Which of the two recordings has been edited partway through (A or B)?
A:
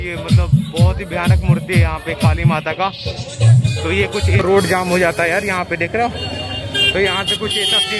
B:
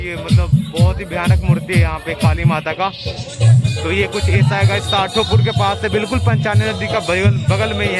A